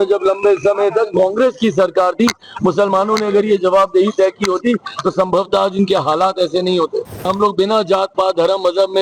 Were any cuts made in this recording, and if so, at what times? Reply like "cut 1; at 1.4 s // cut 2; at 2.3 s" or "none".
cut 1; at 7.3 s

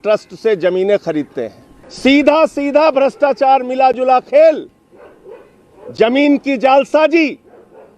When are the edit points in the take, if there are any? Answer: none

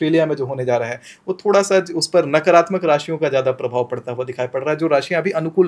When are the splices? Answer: none

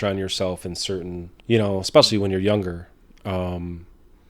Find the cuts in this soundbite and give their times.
cut 1; at 1.3 s

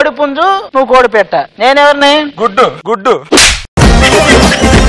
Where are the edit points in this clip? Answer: none

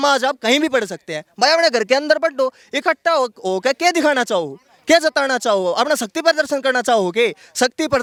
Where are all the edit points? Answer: none

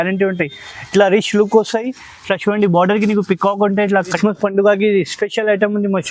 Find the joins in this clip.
cut 1; at 4.1 s

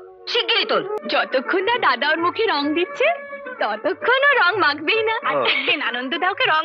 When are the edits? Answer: cut 1; at 1.0 s

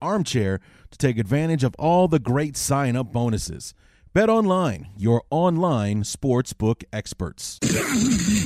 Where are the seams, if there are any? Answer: cut 1; at 7.5 s

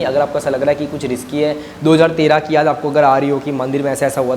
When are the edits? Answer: none

